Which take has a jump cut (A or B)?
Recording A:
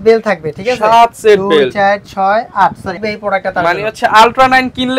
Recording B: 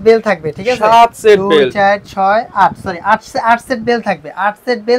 A